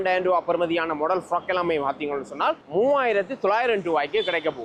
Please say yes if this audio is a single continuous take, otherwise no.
yes